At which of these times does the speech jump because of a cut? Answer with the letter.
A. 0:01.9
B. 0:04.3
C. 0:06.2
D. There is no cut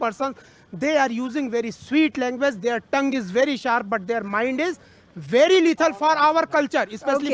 D